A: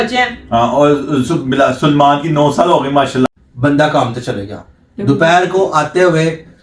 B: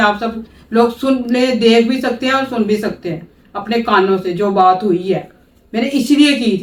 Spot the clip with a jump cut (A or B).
A